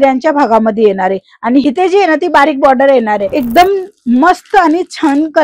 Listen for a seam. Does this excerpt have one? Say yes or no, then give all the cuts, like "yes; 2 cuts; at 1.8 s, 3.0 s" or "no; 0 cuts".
yes; 1 cut; at 3.3 s